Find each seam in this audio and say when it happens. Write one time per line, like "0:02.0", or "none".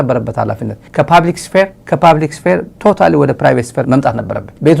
none